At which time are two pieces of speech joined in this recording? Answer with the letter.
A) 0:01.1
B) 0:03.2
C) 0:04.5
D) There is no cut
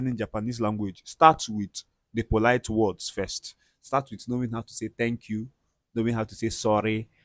D